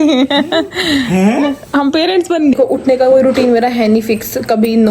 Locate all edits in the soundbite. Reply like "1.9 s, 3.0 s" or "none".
2.6 s